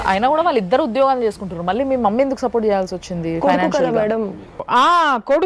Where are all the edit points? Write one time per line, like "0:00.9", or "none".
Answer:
none